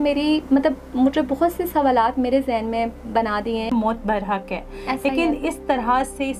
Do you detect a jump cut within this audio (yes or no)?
yes